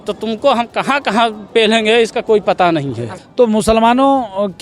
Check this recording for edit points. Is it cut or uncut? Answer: cut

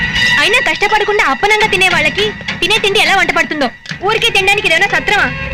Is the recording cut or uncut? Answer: uncut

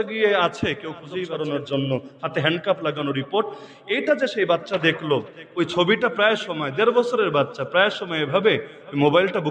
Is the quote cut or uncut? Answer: cut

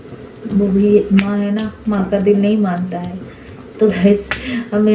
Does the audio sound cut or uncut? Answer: uncut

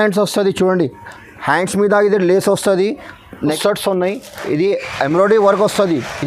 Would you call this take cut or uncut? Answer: cut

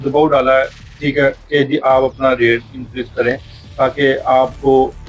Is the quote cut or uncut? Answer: uncut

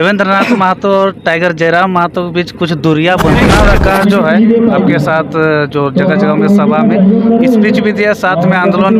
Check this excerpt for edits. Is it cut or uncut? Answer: cut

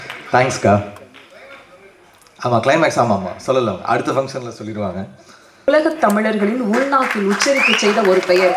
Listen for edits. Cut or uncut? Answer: cut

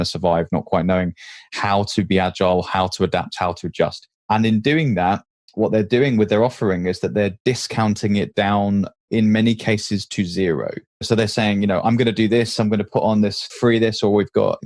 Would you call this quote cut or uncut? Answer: uncut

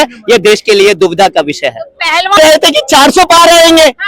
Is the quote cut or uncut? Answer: cut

